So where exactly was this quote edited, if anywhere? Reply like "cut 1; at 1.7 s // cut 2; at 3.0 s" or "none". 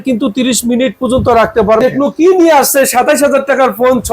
cut 1; at 1.8 s